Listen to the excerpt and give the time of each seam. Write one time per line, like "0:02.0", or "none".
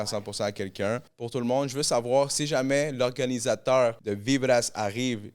0:01.1
0:04.1